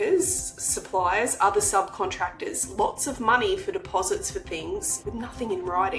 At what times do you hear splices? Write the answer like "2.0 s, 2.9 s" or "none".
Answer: 5.0 s